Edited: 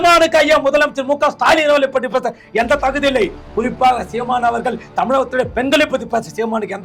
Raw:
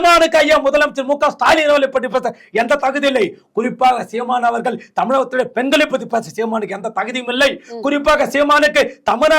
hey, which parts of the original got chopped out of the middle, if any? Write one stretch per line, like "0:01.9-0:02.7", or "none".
none